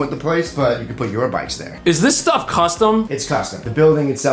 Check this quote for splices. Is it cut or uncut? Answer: cut